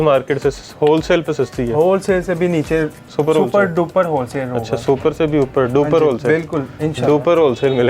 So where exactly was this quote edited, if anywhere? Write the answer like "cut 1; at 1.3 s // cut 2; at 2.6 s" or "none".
cut 1; at 3.0 s